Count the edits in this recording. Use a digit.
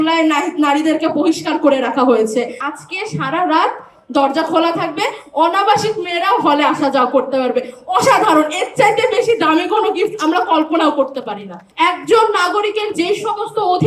2